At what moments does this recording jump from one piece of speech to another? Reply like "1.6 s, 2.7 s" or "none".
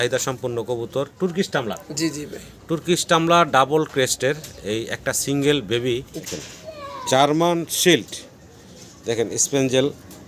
6.1 s

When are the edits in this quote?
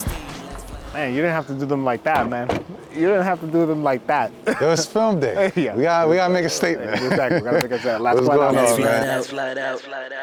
none

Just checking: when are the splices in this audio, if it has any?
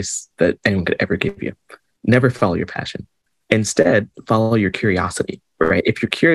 5.4 s

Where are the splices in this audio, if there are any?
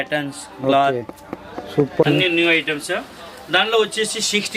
2.0 s

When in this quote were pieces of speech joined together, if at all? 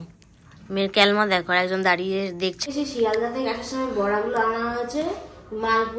2.6 s

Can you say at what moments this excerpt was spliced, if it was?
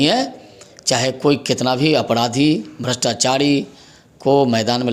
none

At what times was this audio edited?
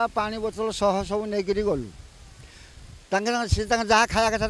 none

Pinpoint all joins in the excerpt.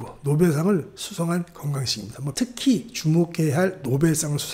2.3 s

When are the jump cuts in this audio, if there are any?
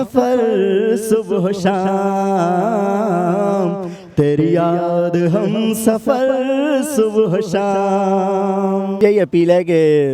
9.0 s

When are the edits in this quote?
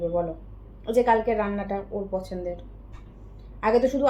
none

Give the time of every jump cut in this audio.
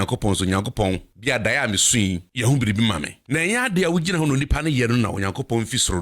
1.1 s, 2.3 s, 3.1 s

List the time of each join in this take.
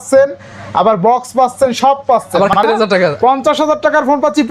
2.6 s

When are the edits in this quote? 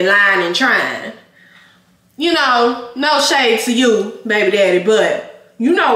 none

